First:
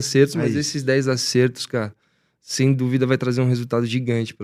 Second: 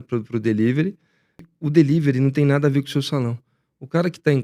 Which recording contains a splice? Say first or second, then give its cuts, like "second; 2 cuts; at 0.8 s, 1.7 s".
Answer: second; 1 cut; at 1.5 s